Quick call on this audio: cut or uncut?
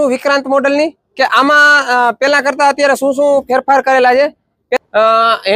cut